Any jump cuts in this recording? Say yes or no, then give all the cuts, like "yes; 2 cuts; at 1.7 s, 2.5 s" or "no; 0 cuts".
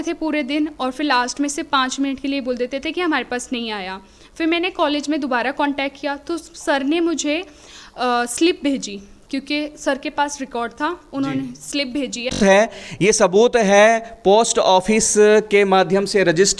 yes; 1 cut; at 12.4 s